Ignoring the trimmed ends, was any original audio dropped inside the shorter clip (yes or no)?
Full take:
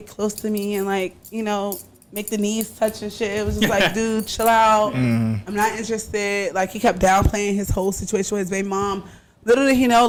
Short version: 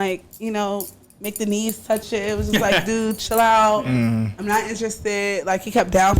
yes